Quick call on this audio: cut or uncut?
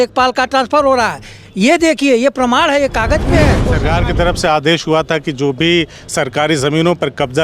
cut